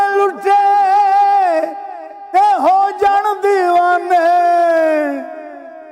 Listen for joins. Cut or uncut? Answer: uncut